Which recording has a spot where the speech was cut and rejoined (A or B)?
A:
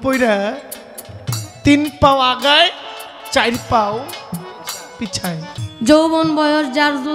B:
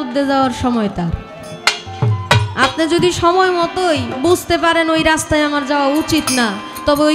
A